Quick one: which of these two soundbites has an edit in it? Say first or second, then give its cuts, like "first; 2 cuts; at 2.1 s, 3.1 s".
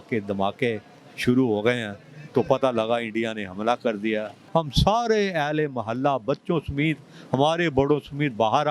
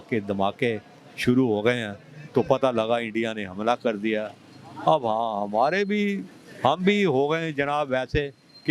first; 1 cut; at 4.4 s